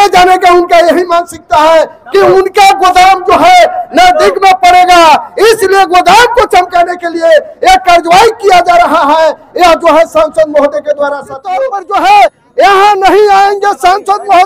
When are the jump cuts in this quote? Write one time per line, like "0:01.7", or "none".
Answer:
0:11.6